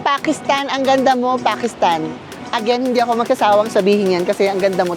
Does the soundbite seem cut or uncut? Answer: uncut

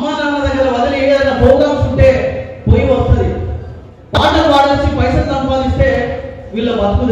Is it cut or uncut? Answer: uncut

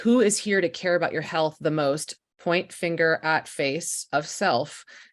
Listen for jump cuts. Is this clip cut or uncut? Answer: uncut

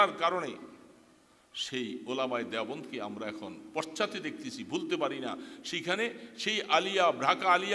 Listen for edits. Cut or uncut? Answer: uncut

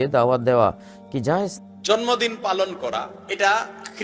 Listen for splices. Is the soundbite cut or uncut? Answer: cut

